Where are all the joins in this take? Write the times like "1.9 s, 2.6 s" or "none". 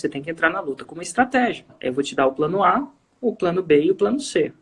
1.7 s